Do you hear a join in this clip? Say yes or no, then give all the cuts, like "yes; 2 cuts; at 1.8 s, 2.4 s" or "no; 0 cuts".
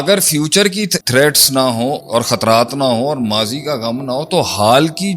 yes; 2 cuts; at 1.0 s, 2.0 s